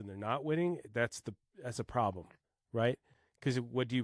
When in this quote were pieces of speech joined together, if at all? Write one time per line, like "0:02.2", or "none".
none